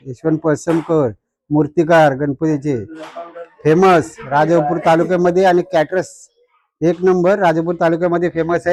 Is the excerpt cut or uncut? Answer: uncut